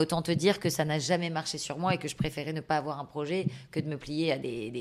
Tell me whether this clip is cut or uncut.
uncut